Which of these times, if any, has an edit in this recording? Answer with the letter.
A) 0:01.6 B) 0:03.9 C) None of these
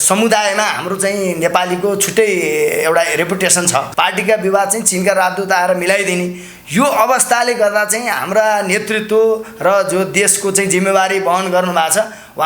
B